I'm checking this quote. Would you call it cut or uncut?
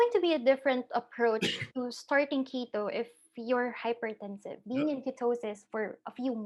cut